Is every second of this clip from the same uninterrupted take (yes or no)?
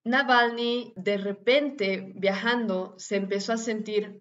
no